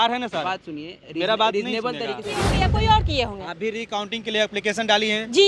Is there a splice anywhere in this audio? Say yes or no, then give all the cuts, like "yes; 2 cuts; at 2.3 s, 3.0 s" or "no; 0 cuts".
yes; 1 cut; at 2.5 s